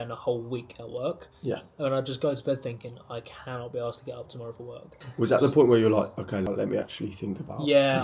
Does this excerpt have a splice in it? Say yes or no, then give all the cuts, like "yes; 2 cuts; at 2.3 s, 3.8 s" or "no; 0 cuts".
no; 0 cuts